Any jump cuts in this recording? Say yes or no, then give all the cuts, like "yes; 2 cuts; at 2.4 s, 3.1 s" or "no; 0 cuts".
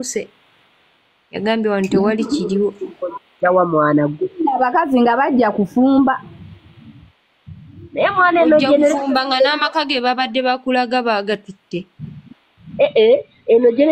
no; 0 cuts